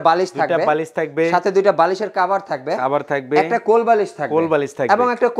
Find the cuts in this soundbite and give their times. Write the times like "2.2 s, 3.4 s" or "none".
none

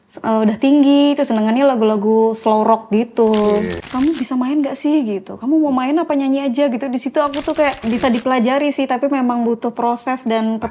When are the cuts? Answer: 3.8 s, 7.8 s

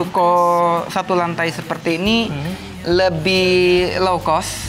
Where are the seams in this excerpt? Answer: none

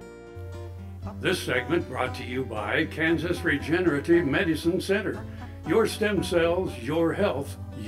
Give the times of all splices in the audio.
none

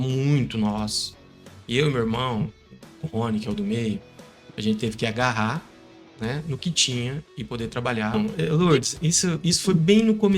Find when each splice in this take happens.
8.1 s

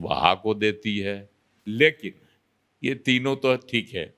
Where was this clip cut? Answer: 1.6 s

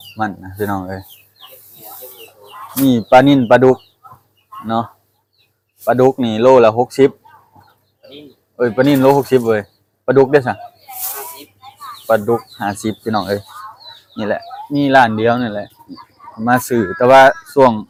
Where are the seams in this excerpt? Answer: none

